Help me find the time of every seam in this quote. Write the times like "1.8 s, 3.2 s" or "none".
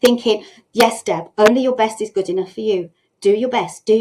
none